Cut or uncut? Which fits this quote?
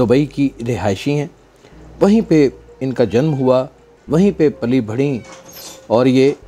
uncut